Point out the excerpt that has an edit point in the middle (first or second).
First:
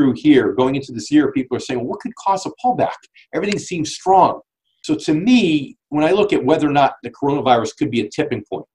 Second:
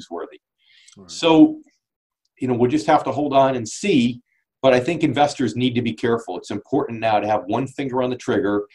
first